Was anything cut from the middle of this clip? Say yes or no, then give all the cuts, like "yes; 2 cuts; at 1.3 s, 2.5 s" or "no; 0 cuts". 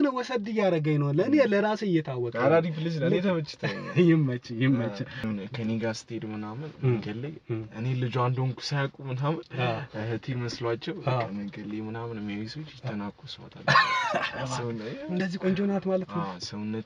yes; 1 cut; at 5.3 s